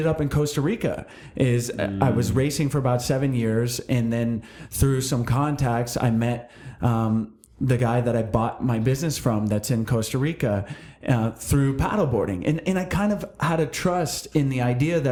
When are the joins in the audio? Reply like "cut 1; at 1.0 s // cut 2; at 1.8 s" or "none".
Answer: none